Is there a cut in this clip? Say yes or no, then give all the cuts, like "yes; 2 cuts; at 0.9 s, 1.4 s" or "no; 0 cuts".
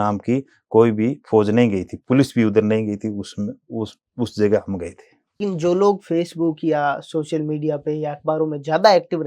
yes; 1 cut; at 5.4 s